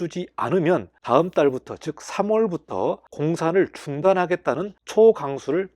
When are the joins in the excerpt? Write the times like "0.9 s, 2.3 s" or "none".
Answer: 0.9 s, 3.1 s, 4.7 s

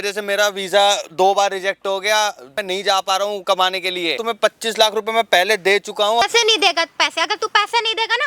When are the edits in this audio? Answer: 2.5 s, 4.2 s, 6.2 s

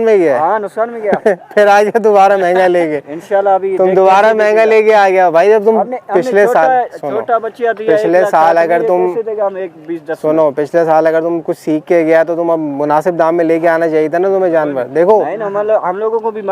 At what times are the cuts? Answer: none

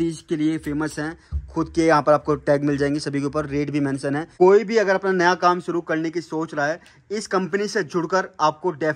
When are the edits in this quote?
4.3 s

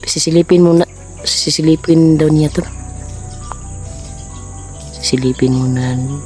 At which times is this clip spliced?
2.7 s, 5.1 s

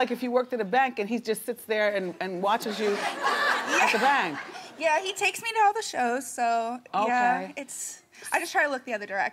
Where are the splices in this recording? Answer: 2.1 s

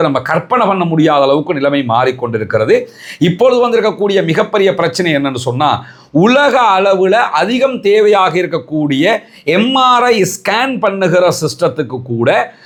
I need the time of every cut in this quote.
none

